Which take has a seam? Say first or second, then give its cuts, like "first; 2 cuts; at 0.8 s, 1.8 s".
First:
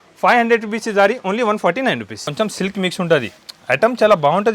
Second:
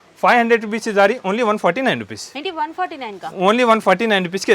first; 1 cut; at 2.2 s